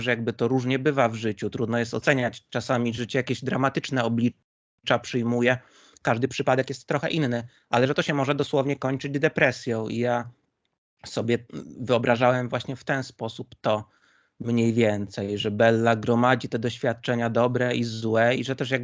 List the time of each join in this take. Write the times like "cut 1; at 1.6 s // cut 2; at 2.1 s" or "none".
none